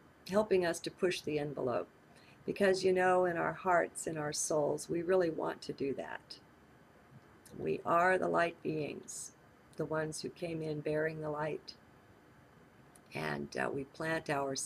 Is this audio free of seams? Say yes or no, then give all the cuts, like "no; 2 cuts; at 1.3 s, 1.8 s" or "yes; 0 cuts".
no; 1 cut; at 8.2 s